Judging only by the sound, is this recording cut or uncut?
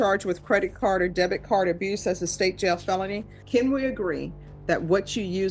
cut